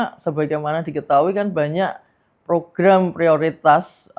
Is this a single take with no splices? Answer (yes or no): yes